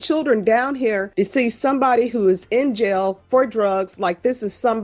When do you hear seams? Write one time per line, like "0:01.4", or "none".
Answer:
0:01.1